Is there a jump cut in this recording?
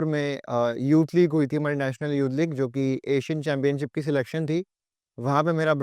no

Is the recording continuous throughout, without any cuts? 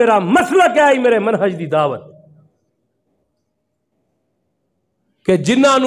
yes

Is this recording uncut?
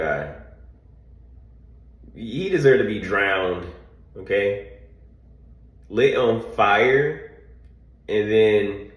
yes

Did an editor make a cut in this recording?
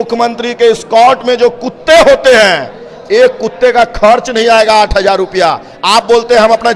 no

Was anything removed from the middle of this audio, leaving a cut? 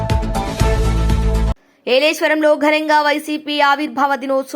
yes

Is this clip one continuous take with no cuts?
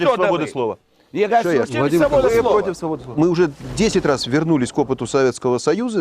no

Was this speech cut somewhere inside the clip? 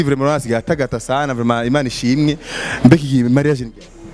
no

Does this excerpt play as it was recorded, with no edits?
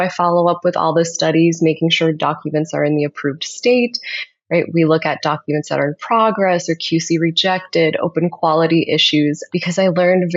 yes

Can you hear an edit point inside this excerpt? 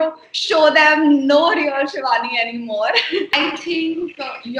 yes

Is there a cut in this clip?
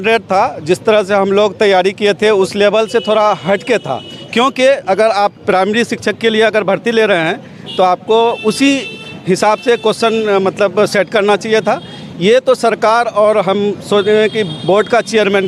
no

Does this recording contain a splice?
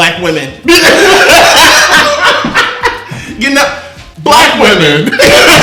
no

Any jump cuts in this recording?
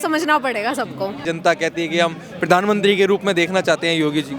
yes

